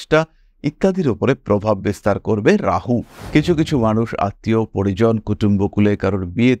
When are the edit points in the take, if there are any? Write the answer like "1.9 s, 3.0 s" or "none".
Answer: 3.2 s